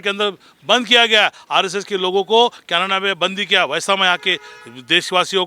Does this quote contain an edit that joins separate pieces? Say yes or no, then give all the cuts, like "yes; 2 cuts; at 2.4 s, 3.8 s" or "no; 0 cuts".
no; 0 cuts